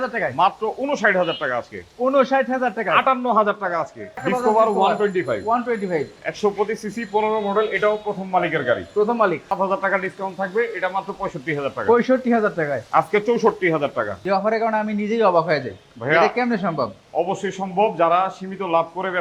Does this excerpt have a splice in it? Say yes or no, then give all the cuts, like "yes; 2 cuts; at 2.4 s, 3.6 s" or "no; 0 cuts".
yes; 3 cuts; at 4.2 s, 9.5 s, 14.2 s